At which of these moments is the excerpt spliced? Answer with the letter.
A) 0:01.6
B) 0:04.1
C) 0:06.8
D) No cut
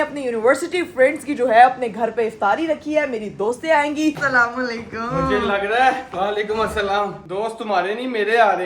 B